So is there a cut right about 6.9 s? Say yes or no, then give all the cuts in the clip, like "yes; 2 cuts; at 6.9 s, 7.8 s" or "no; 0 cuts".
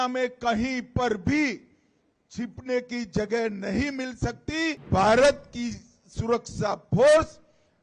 no; 1 cut; at 4.8 s